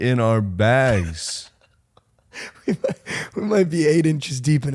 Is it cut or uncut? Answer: uncut